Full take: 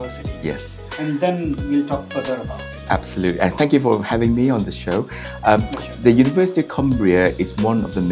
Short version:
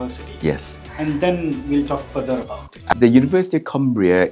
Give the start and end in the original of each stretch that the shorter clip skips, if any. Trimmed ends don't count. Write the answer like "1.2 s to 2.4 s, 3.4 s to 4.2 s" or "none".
2.9 s to 6.0 s

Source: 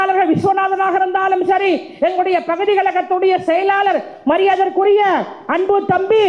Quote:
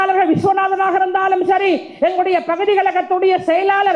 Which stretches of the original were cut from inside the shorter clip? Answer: none

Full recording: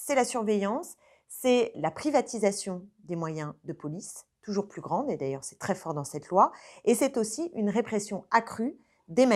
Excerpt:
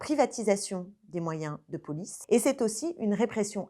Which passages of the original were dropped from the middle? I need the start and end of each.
4.1 s to 6.7 s

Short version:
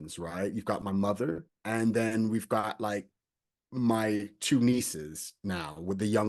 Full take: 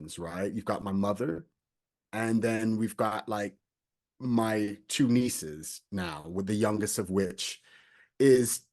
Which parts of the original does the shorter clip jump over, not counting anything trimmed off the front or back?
1.5 s to 2.0 s

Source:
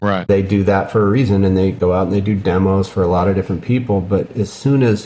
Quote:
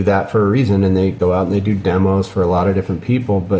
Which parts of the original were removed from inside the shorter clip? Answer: none

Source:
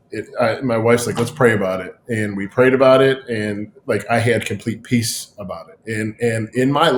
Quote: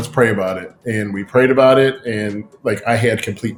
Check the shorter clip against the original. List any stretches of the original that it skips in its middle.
none

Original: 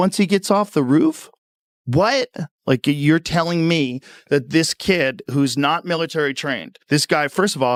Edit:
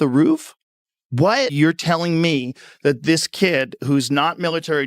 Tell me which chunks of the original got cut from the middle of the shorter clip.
2.3 s to 3.0 s

